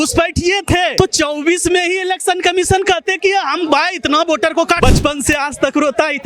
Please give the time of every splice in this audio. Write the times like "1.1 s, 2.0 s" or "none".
0.9 s, 4.8 s